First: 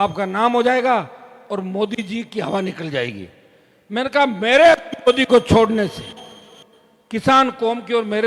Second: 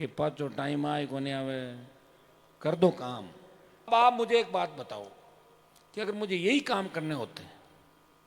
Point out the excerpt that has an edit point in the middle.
second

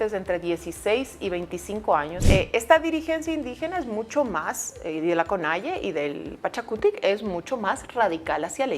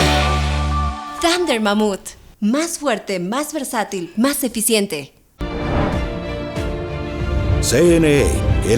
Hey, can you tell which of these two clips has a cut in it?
first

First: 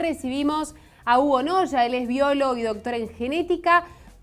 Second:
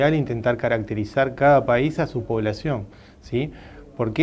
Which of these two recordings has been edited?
second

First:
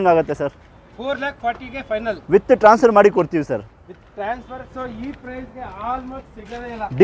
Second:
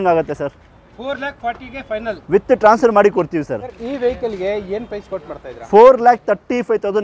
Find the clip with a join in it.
second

